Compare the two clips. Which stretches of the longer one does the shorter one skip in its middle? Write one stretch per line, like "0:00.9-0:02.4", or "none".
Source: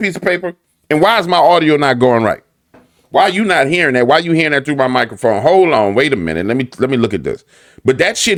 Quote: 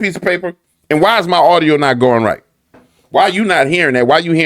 none